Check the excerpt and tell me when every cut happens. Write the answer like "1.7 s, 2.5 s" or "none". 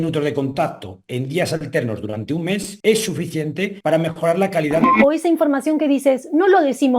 2.7 s, 3.7 s, 4.9 s

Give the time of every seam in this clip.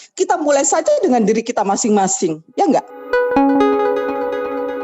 3.0 s

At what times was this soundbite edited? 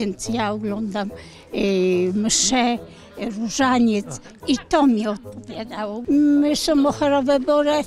none

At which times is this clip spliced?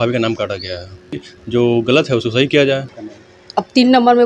1.3 s, 2.9 s

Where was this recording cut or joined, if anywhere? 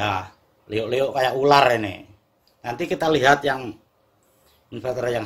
none

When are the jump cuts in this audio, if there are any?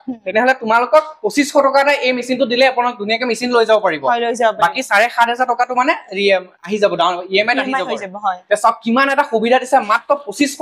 none

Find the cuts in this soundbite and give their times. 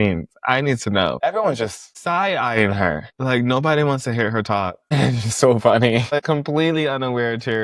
1.2 s, 6.2 s

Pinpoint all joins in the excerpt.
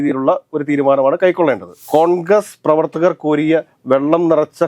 1.8 s

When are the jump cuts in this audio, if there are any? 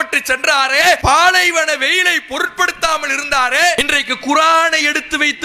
1.0 s, 3.8 s

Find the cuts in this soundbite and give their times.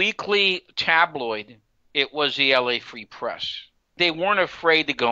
4.0 s

